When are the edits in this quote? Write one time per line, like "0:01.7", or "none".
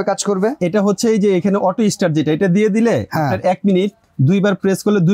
0:04.0